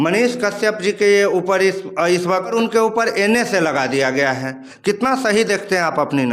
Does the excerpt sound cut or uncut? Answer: cut